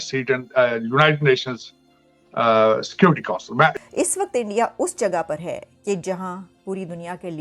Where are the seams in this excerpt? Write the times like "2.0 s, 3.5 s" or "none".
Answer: 3.7 s